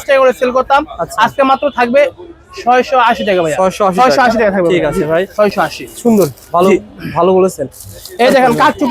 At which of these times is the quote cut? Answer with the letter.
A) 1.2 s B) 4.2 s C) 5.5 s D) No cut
D